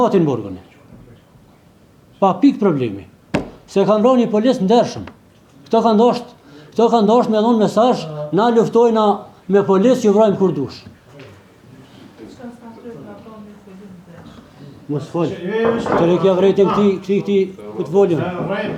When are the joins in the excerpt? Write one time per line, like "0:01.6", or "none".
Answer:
none